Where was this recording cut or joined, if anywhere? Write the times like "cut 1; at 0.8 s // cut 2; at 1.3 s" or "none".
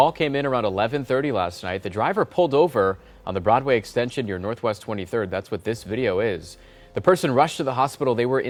none